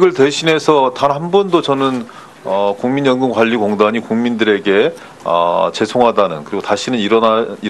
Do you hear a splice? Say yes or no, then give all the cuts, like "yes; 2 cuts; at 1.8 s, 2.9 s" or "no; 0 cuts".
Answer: yes; 1 cut; at 3.7 s